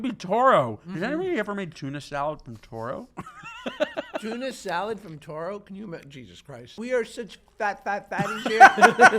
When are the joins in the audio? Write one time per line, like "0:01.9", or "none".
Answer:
0:04.2
0:06.7